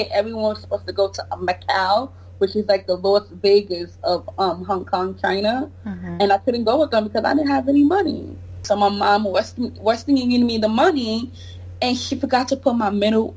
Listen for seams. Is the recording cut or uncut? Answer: cut